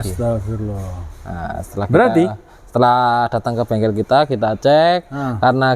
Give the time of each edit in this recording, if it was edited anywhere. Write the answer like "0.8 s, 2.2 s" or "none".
none

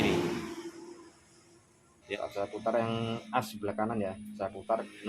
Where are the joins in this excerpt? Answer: 2.2 s

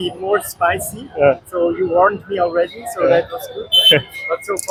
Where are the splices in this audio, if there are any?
none

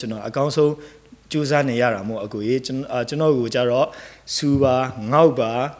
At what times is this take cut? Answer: none

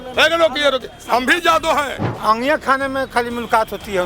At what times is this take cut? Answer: 2.0 s

